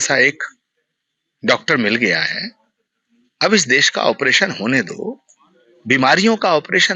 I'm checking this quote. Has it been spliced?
no; 0 cuts

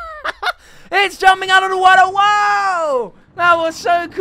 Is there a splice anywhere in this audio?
yes; 1 cut; at 3.2 s

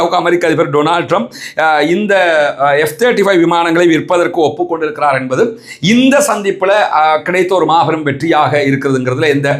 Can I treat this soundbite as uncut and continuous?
yes; 0 cuts

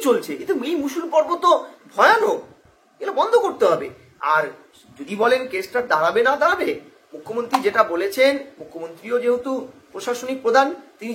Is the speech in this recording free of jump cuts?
yes; 0 cuts

